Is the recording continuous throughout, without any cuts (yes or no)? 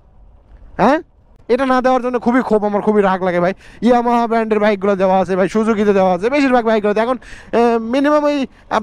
no